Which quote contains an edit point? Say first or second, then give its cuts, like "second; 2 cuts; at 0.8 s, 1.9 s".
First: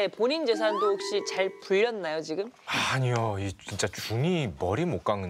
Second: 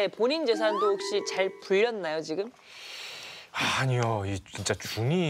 first; 1 cut; at 2.6 s